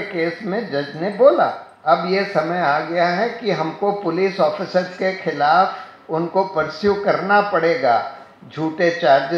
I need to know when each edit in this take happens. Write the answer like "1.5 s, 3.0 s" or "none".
1.7 s